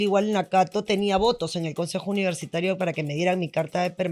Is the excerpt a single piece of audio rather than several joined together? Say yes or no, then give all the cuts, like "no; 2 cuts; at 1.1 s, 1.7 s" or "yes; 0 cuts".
yes; 0 cuts